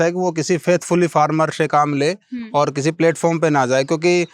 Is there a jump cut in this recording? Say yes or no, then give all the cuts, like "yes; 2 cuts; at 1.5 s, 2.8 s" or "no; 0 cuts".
no; 0 cuts